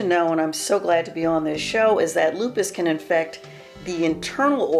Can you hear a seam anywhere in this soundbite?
no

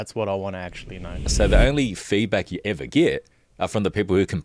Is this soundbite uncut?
no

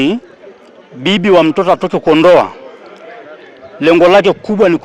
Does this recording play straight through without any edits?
yes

